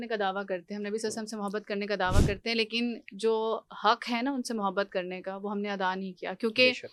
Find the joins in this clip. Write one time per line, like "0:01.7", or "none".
none